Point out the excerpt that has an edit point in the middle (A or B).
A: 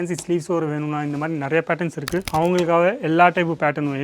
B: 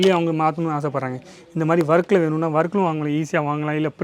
A